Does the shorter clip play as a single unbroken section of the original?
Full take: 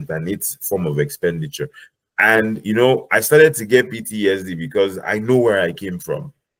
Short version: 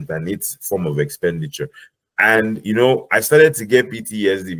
yes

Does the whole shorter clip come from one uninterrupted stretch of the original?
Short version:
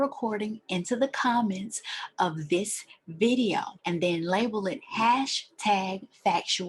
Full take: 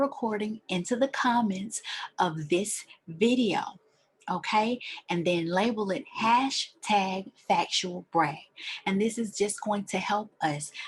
no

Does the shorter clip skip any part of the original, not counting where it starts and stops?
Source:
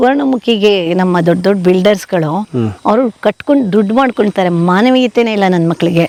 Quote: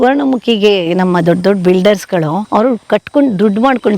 yes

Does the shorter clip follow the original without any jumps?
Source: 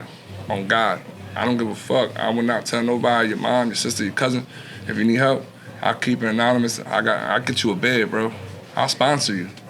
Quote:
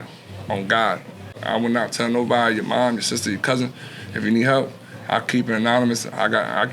no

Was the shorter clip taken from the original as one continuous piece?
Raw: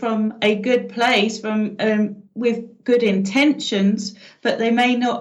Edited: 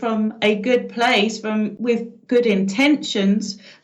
no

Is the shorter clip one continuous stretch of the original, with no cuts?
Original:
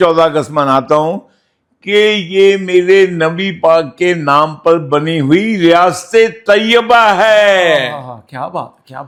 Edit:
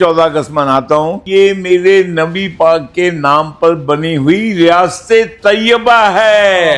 no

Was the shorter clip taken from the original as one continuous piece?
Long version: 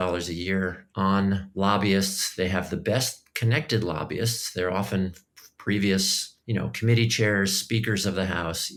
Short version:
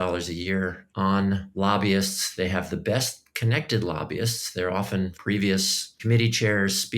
no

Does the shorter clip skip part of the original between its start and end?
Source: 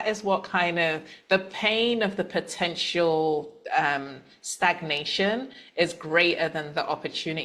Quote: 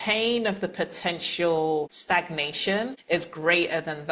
yes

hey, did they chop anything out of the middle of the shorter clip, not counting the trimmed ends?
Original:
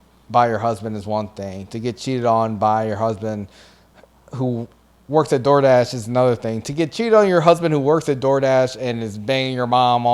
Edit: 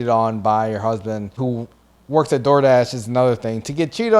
yes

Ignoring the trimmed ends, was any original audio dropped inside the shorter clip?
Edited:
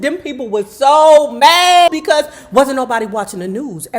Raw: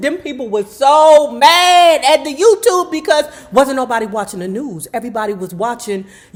yes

